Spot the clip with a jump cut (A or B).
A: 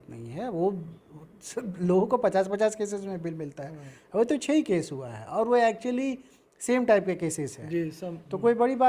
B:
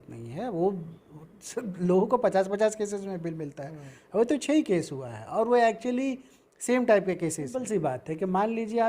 B